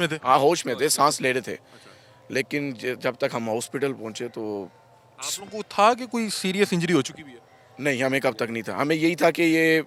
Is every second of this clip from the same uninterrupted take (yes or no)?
yes